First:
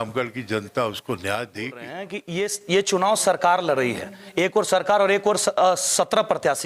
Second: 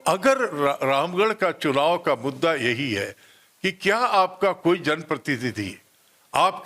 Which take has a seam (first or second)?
first